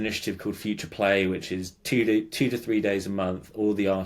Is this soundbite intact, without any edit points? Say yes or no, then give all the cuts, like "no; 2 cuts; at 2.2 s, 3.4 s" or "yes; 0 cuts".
yes; 0 cuts